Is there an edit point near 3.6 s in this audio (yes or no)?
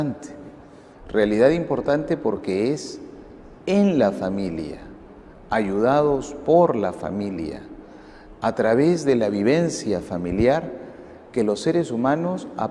no